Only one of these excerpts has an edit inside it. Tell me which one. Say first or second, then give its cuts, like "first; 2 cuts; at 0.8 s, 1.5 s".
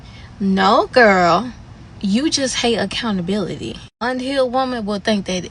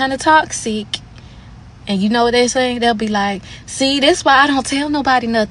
first; 1 cut; at 4.1 s